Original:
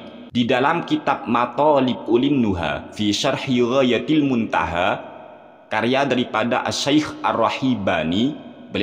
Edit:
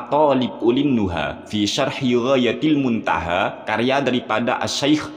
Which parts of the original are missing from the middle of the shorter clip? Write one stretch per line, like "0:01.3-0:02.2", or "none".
0:05.1-0:05.6